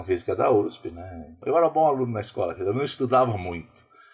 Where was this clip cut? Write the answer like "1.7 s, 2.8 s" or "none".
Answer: 1.4 s